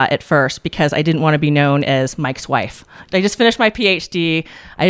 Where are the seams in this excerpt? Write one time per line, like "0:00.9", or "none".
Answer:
0:03.0